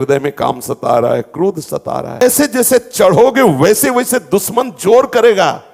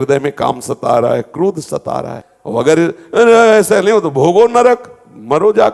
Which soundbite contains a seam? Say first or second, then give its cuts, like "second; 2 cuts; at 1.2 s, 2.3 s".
second; 1 cut; at 2.1 s